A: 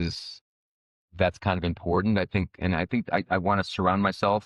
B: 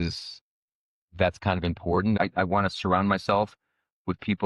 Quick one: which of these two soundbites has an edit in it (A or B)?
B